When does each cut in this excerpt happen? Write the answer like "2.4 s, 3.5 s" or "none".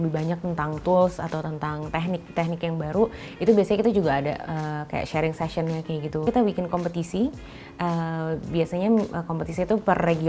6.3 s